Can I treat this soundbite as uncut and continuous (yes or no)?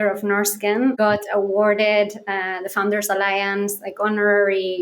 no